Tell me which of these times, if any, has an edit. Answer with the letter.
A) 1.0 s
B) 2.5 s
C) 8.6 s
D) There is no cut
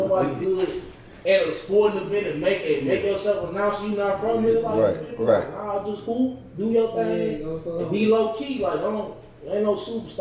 D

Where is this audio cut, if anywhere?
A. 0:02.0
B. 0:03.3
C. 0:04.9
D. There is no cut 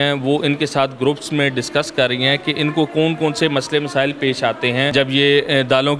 C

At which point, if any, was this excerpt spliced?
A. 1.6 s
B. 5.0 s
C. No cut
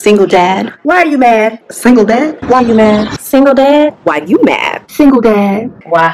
C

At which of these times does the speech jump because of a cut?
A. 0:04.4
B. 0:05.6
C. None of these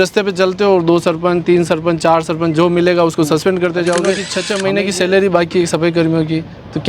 A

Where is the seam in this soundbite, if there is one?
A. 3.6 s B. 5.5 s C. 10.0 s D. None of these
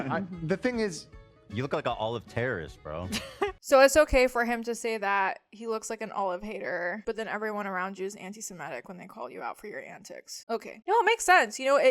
A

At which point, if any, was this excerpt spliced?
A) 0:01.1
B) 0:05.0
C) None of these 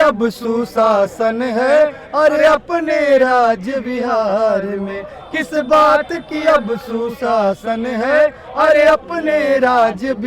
C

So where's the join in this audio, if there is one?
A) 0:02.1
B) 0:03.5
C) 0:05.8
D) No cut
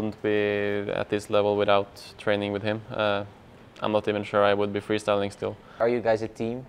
C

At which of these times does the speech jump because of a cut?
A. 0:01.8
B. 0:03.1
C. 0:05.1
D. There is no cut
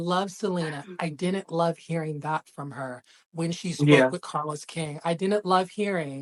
D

